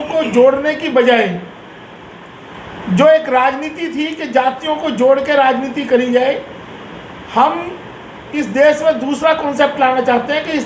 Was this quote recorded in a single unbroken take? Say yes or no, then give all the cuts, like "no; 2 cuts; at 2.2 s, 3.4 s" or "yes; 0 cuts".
yes; 0 cuts